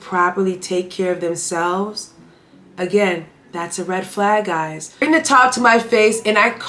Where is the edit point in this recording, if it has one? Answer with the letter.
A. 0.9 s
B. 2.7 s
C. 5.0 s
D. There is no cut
C